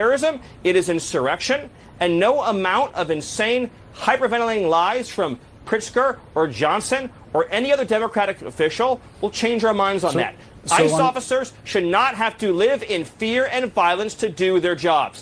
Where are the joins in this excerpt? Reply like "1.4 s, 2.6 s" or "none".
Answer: none